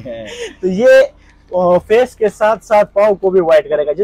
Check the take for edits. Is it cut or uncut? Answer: uncut